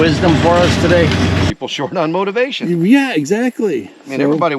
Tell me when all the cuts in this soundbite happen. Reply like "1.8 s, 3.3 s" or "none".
1.5 s